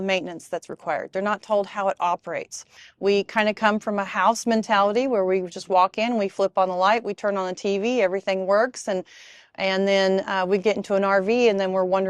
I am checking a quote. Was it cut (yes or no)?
no